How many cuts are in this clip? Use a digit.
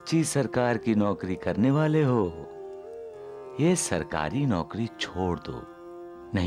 0